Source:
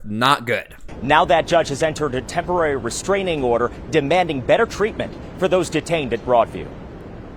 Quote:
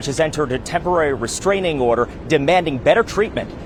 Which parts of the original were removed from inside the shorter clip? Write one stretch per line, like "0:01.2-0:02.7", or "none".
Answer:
none